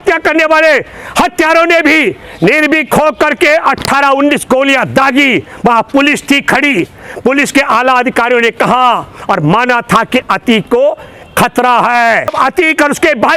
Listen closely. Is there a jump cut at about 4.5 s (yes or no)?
no